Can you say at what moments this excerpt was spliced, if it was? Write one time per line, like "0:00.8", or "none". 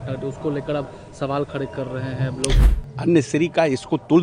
0:02.6